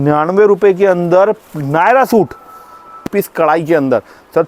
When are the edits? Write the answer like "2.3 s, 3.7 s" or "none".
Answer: 3.0 s